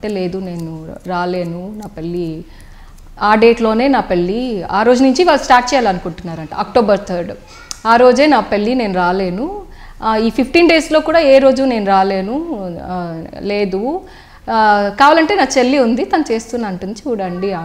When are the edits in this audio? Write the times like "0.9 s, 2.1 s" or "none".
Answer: none